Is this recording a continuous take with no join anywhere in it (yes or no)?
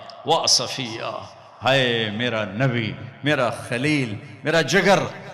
yes